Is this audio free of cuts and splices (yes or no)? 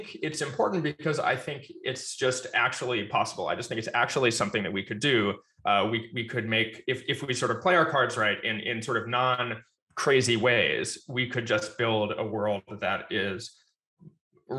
yes